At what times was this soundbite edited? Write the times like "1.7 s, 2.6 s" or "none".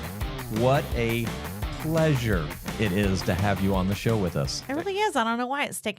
3.2 s